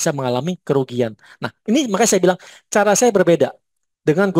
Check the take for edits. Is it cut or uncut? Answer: uncut